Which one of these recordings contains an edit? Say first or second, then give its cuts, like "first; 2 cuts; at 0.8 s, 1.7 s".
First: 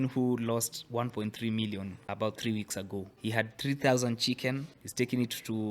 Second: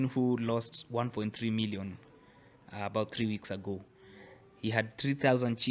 first; 3 cuts; at 2.0 s, 3.1 s, 4.8 s